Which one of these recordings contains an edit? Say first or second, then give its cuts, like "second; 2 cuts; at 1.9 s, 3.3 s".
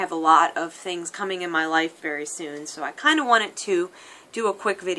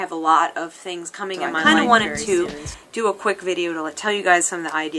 second; 1 cut; at 1.5 s